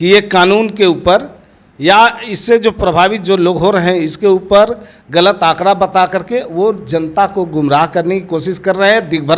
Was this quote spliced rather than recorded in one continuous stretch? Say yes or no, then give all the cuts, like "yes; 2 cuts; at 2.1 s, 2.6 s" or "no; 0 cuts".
no; 0 cuts